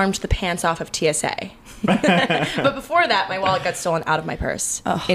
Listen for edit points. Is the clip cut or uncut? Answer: uncut